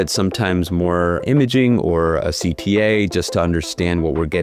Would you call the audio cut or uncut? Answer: cut